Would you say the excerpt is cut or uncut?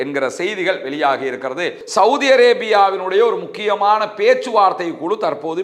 cut